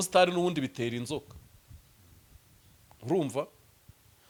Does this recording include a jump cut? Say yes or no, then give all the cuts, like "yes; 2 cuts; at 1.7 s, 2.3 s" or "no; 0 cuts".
no; 0 cuts